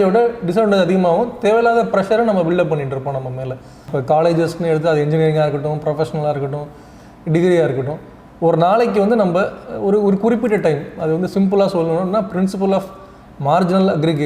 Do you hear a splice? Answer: yes; 1 cut; at 3.8 s

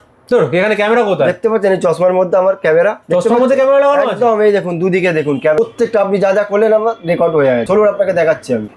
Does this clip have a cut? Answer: no; 0 cuts

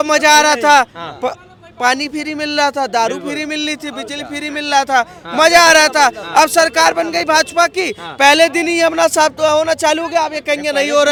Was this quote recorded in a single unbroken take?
yes; 0 cuts

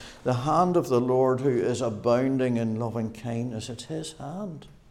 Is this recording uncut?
yes; 0 cuts

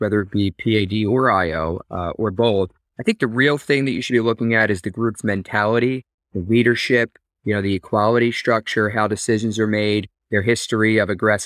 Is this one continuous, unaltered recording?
no; 1 cut; at 2.8 s

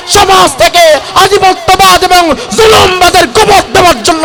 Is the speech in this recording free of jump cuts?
yes; 0 cuts

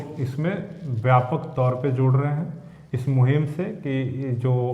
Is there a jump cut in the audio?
no; 0 cuts

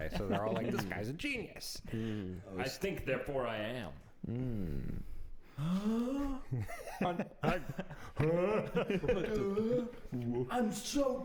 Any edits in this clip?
no; 0 cuts

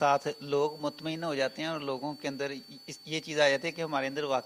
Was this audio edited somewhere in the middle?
no; 0 cuts

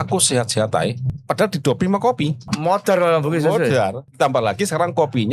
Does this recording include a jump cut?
yes; 3 cuts; at 1.1 s, 2.4 s, 4.1 s

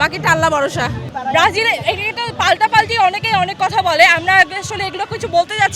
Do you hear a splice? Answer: yes; 1 cut; at 1.1 s

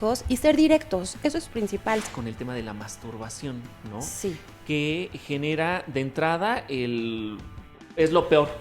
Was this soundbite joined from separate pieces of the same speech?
yes; 1 cut; at 2.0 s

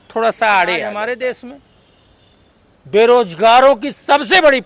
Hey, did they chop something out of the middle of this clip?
yes; 1 cut; at 0.9 s

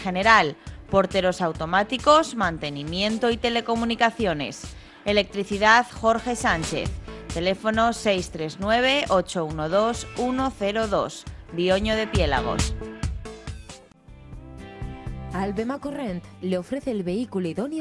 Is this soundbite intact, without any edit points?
no; 1 cut; at 13.9 s

